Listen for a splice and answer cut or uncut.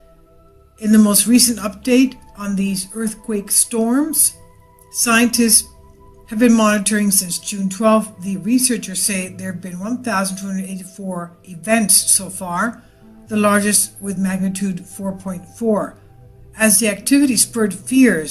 uncut